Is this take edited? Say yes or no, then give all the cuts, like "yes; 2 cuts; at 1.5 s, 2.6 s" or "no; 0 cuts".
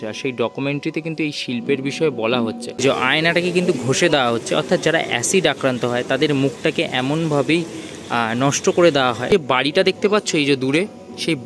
yes; 2 cuts; at 2.8 s, 9.5 s